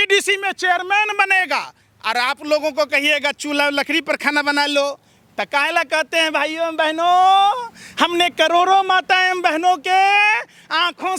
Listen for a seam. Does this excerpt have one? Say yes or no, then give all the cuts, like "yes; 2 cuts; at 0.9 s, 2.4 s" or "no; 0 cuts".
no; 0 cuts